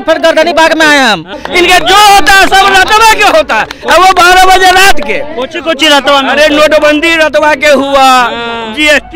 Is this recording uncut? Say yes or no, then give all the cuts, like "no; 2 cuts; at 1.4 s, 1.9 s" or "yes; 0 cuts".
no; 1 cut; at 1.4 s